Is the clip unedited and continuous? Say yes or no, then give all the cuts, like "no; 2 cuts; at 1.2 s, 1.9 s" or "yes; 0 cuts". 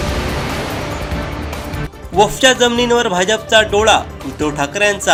yes; 0 cuts